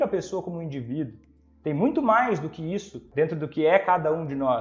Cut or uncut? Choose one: cut